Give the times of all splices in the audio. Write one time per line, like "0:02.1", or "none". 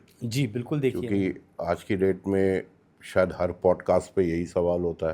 none

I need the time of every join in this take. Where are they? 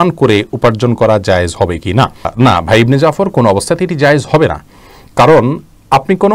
none

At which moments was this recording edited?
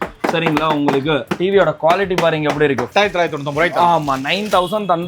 0:01.3
0:02.9

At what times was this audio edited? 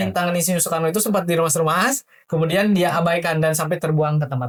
none

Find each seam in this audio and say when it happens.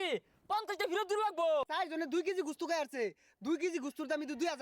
0:01.7

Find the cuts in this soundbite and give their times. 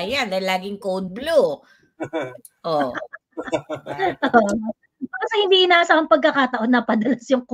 none

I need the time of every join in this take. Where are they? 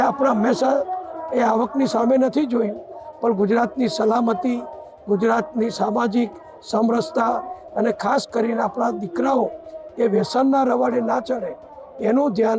none

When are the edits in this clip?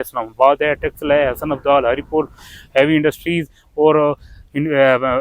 none

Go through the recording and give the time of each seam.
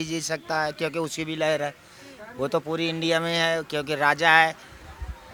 none

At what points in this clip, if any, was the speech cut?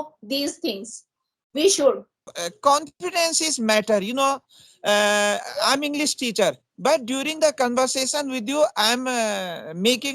0:02.3

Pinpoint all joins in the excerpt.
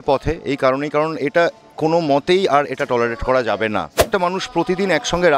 0:04.1

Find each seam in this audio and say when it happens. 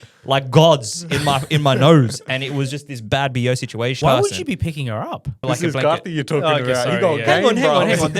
0:04.0
0:05.4

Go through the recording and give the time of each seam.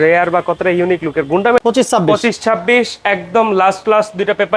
0:01.6

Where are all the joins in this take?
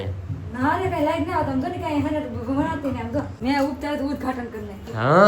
0:03.4

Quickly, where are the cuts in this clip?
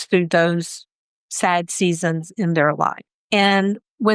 0:03.1

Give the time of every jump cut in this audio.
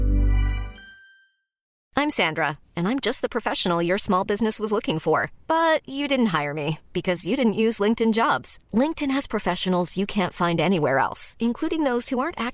0:01.7

